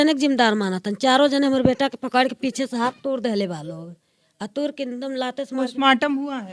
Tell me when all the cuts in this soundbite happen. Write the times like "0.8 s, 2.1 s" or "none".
none